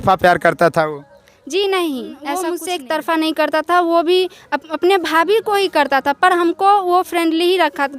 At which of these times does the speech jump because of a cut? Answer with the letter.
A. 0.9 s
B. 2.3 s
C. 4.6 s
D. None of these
B